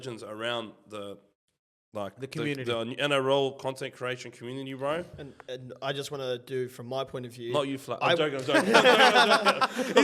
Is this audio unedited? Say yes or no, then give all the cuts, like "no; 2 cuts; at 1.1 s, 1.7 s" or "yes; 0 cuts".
yes; 0 cuts